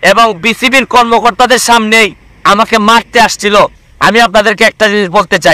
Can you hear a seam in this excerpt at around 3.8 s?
yes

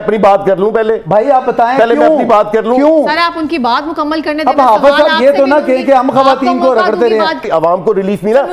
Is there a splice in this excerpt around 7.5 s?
yes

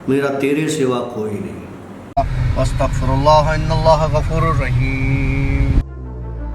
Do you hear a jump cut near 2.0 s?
yes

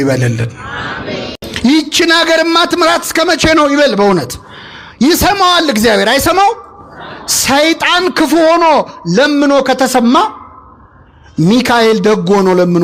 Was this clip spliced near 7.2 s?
no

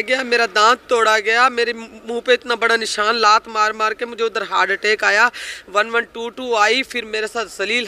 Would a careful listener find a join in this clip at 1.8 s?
no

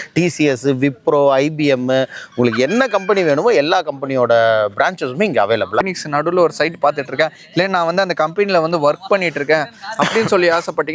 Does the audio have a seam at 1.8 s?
no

